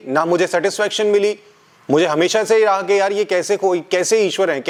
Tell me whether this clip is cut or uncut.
uncut